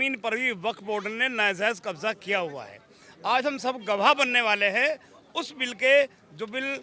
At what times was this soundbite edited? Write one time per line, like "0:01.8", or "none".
none